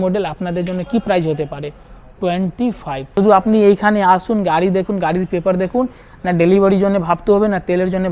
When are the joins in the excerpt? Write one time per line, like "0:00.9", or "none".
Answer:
0:03.0

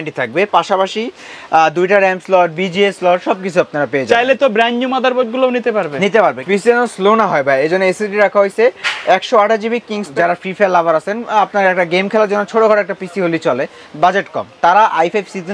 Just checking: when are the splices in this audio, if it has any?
0:06.4
0:10.1

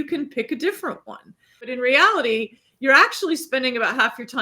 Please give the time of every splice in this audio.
0:01.7

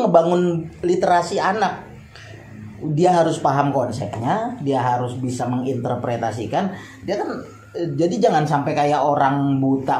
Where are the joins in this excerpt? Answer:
none

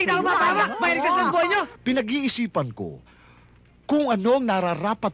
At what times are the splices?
0:01.7

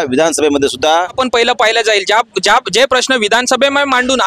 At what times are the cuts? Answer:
0:01.2

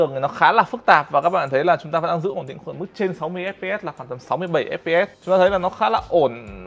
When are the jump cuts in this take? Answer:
0:05.2

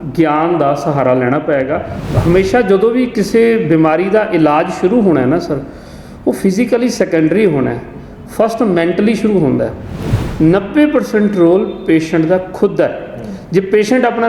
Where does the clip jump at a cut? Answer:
0:02.0
0:09.9

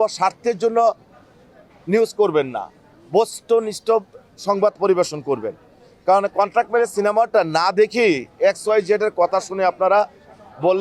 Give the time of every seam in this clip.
none

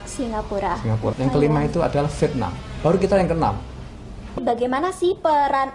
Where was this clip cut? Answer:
0:01.1
0:04.4

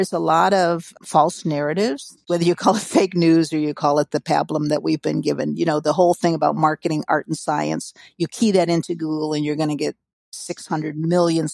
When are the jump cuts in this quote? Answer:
0:00.9
0:02.1

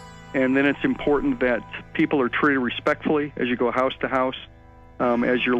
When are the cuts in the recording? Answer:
0:01.7

